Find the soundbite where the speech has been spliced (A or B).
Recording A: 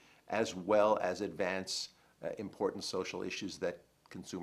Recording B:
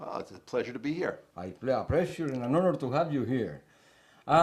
B